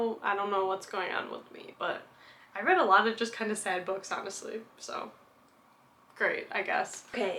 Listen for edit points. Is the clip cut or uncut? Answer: uncut